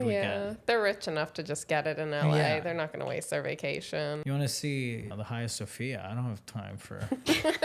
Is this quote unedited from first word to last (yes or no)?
no